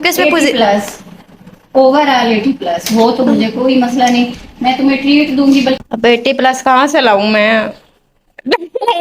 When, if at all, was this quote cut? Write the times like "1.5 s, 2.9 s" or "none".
5.8 s